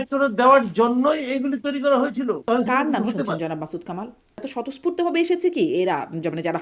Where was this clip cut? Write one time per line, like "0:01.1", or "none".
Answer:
0:02.4
0:04.5